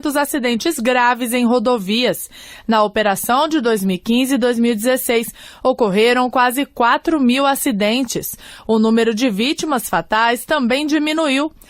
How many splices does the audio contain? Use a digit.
0